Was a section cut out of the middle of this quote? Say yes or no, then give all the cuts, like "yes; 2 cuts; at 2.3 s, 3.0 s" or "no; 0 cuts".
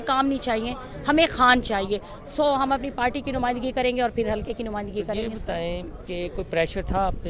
no; 0 cuts